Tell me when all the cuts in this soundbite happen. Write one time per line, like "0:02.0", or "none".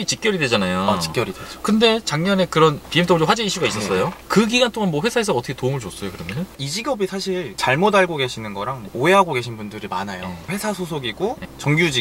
0:04.2
0:06.5
0:10.5